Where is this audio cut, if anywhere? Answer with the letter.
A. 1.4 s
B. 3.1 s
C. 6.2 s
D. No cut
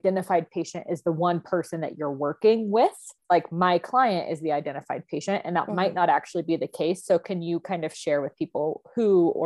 B